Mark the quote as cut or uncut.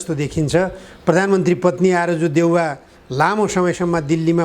uncut